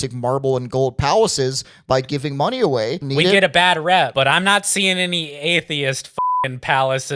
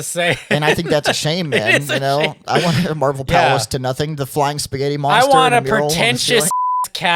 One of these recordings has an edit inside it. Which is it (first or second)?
first